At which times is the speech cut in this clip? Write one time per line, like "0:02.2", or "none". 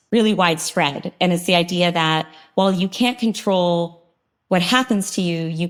none

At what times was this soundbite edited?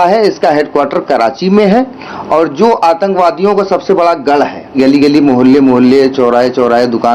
0:04.7

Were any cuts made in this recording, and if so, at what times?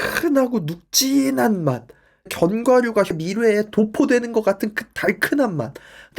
0:02.3
0:03.2

